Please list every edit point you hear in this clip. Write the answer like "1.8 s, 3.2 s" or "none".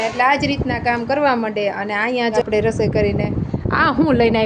2.4 s